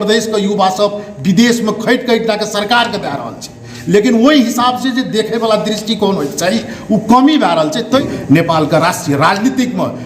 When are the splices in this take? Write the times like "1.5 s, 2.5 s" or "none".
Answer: 8.0 s